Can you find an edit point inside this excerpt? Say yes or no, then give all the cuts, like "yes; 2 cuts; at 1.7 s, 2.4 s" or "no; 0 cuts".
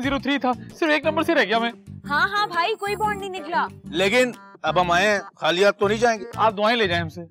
yes; 1 cut; at 3.8 s